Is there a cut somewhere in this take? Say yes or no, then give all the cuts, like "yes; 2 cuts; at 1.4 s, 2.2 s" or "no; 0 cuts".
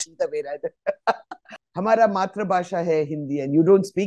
yes; 1 cut; at 1.6 s